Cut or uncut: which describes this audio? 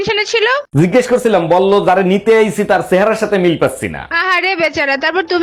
uncut